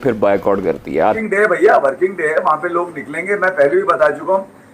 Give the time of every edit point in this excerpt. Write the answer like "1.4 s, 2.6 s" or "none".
1.2 s